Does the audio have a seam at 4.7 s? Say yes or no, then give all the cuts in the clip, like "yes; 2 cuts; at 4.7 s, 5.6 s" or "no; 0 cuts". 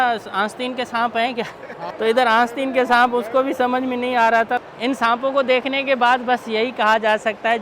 yes; 2 cuts; at 1.9 s, 4.7 s